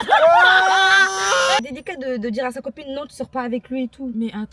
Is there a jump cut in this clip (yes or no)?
yes